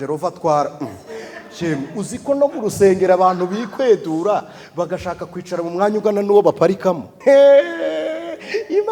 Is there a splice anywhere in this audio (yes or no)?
yes